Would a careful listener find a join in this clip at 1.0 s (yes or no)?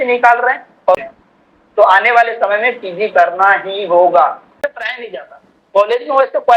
yes